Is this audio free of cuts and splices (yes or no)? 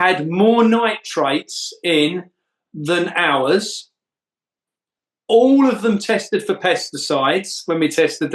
yes